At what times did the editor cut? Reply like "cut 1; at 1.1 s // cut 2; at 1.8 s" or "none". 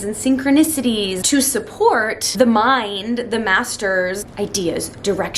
cut 1; at 1.2 s // cut 2; at 2.2 s // cut 3; at 4.3 s